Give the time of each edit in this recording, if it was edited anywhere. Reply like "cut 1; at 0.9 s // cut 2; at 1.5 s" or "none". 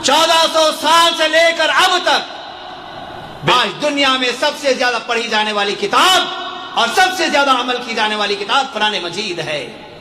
cut 1; at 3.4 s